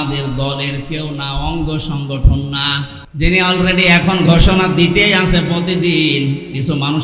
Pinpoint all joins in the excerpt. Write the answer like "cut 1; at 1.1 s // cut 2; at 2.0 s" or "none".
cut 1; at 3.0 s